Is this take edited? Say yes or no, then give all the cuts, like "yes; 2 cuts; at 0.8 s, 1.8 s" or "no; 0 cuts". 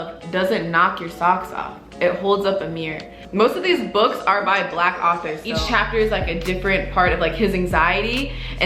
yes; 2 cuts; at 3.2 s, 5.5 s